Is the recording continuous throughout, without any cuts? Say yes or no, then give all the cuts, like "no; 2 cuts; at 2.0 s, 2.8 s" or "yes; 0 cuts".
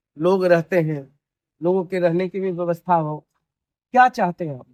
yes; 0 cuts